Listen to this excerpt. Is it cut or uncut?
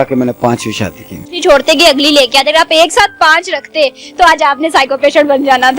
cut